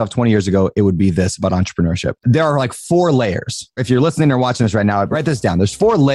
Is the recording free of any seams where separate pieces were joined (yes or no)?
no